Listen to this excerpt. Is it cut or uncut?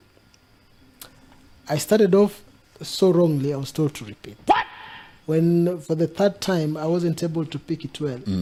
uncut